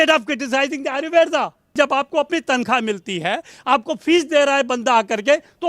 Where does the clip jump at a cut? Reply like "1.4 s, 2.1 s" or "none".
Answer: 1.8 s